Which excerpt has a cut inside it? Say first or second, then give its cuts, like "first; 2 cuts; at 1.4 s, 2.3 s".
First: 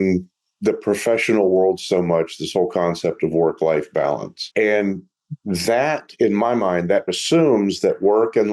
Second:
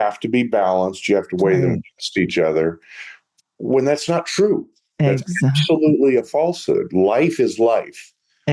first; 2 cuts; at 4.3 s, 7.1 s